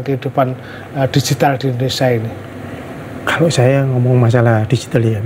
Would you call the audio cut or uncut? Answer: uncut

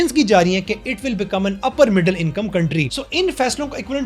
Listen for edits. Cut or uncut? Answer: cut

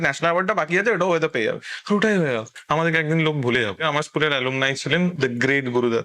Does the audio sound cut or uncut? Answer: cut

